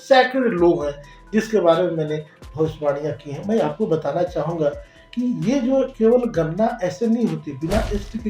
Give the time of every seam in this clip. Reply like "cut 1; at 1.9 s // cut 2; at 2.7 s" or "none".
none